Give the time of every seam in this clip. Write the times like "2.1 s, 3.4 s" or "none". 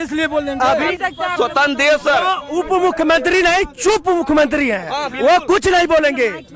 0.9 s